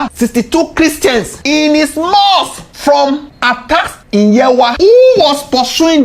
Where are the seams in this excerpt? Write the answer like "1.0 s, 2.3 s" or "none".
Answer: 4.7 s